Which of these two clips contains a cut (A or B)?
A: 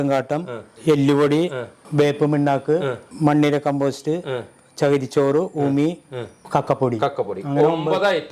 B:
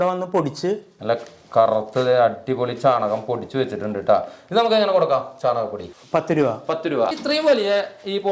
B